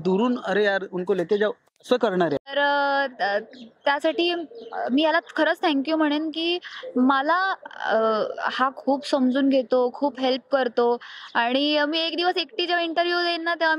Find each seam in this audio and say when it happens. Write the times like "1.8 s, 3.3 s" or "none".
2.5 s